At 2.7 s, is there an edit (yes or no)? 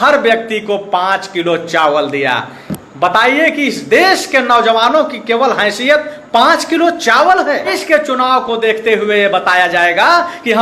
no